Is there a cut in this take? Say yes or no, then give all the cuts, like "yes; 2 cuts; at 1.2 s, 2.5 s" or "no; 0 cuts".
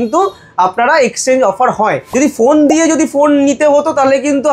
yes; 1 cut; at 2.1 s